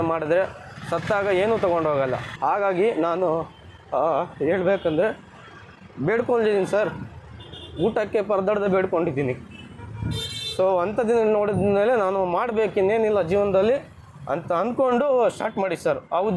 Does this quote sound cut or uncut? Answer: cut